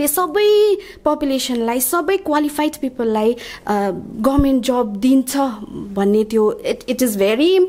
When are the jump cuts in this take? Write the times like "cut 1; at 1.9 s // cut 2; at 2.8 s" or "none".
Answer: none